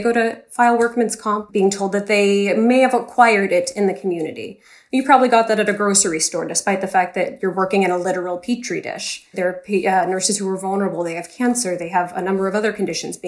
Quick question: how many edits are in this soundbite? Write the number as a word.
two